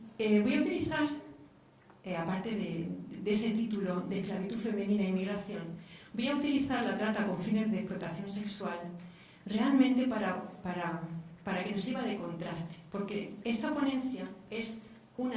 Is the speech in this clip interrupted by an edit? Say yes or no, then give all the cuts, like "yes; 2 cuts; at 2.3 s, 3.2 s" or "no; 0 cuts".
yes; 1 cut; at 6.3 s